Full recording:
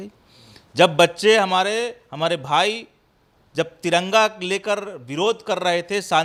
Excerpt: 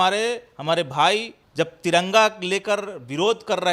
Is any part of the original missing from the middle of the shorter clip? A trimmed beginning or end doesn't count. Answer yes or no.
yes